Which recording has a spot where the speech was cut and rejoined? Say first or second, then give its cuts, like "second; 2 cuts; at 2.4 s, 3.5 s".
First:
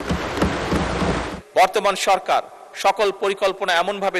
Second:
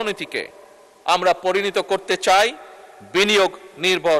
first; 1 cut; at 1.3 s